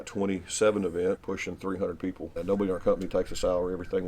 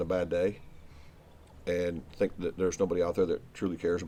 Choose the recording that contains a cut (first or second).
first